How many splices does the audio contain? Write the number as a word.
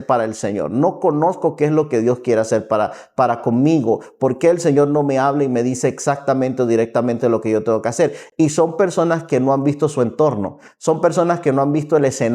zero